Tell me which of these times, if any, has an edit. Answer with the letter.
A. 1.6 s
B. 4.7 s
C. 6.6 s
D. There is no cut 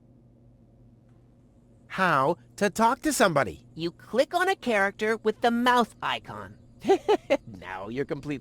A